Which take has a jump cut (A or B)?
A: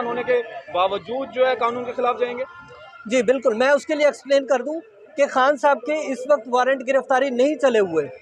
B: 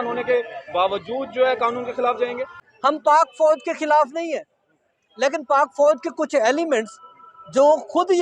B